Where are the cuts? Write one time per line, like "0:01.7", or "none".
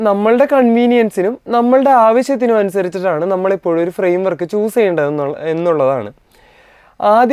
none